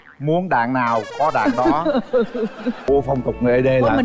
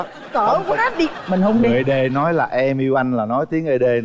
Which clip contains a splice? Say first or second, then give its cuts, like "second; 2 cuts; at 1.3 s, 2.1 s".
first; 1 cut; at 2.8 s